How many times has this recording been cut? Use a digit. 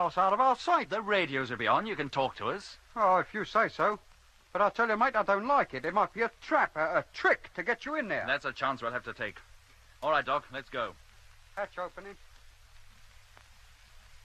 1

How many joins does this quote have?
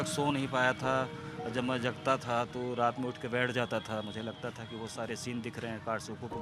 0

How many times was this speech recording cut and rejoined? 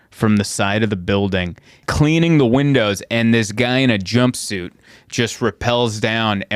1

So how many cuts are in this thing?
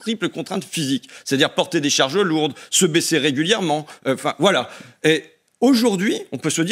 0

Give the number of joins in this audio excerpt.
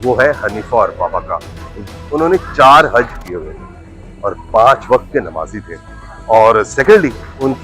1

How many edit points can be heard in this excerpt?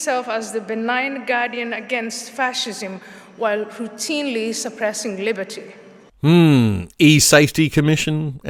0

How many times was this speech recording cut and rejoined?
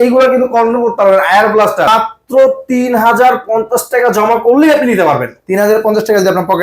1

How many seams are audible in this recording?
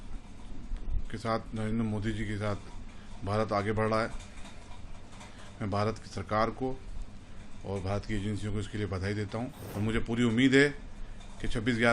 1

